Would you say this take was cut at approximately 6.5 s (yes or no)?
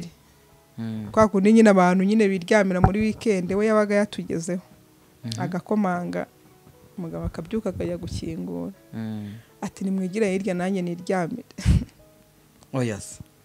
no